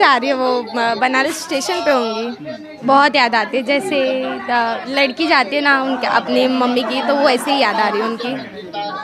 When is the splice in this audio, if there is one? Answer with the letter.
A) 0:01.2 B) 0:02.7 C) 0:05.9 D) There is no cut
B